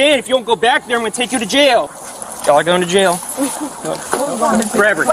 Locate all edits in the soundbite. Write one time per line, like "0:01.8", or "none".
0:01.9